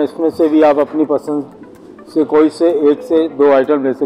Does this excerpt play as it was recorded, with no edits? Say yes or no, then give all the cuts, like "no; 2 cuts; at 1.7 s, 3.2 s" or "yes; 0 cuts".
yes; 0 cuts